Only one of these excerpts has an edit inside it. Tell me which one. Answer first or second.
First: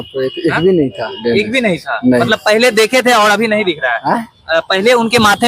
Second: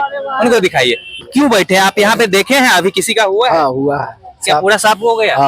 second